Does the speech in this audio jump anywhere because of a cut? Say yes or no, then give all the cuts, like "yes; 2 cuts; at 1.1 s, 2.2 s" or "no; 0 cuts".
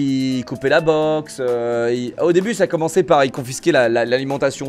no; 0 cuts